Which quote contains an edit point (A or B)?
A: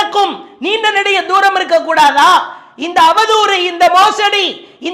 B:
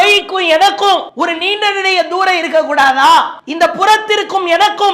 B